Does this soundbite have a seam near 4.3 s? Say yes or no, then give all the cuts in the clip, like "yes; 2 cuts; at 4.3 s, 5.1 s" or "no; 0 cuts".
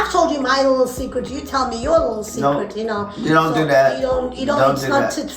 no; 0 cuts